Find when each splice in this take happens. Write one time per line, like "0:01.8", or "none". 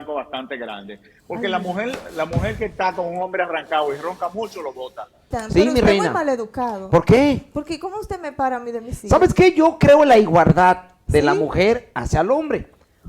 0:05.4